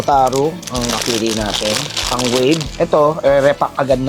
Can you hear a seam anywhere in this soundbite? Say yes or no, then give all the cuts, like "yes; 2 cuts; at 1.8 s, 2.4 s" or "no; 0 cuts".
yes; 1 cut; at 2.7 s